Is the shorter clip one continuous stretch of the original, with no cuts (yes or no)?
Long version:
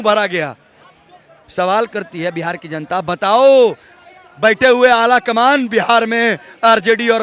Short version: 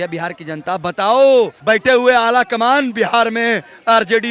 no